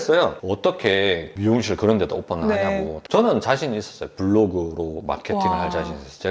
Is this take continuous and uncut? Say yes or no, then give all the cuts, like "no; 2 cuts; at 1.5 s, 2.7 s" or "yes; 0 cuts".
no; 1 cut; at 3.0 s